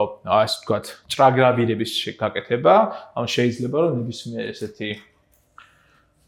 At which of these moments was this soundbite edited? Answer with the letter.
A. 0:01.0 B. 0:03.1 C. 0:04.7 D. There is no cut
D